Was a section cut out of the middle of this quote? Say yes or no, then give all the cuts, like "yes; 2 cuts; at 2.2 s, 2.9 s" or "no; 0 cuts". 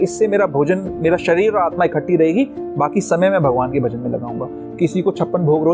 no; 0 cuts